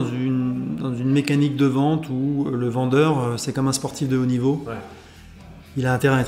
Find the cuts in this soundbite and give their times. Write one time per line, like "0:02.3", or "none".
none